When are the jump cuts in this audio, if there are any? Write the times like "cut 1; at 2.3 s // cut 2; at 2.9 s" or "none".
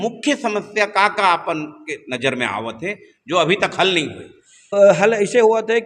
cut 1; at 4.7 s